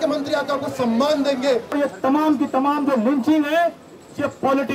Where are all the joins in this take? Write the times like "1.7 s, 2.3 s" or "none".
1.7 s

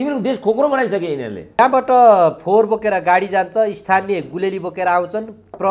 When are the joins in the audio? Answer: 1.6 s

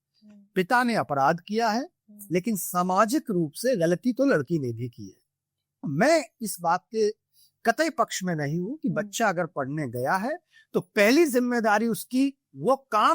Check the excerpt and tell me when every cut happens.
5.9 s

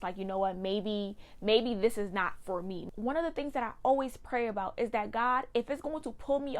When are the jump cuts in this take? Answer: 2.8 s

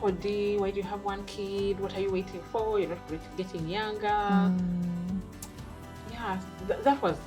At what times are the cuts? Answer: none

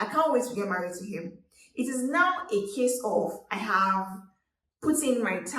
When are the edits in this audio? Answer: 3.4 s

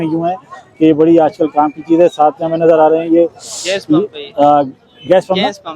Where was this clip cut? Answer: none

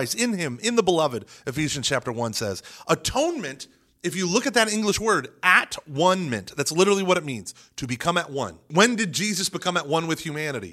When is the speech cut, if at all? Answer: 8.6 s

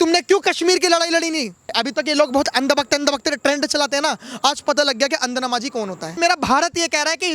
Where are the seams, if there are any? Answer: 1.8 s, 6.2 s

